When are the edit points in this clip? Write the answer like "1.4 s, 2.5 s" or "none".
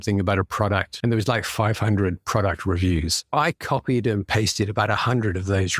0.9 s

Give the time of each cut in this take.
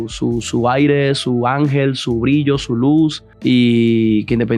3.3 s

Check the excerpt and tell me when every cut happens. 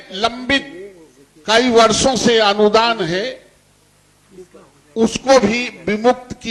none

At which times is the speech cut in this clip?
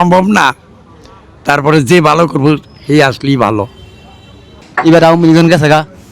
4.6 s

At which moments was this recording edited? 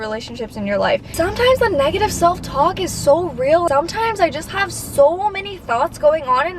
1.1 s, 3.7 s

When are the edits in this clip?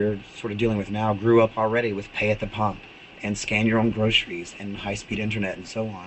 none

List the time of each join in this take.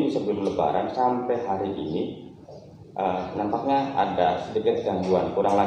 none

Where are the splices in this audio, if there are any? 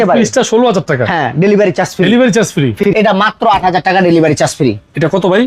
2.8 s

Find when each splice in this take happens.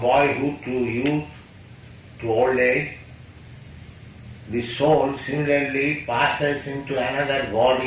none

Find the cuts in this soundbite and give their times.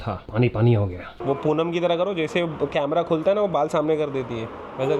1.2 s

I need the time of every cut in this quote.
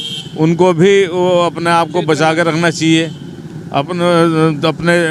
none

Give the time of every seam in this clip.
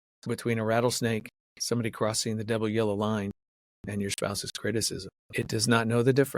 5.2 s

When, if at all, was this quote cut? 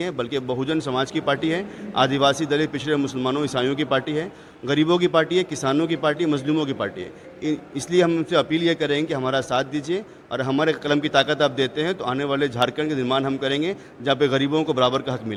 none

